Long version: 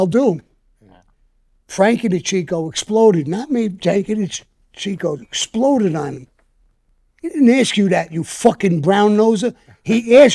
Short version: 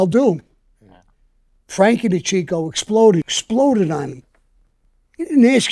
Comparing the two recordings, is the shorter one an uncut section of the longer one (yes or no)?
no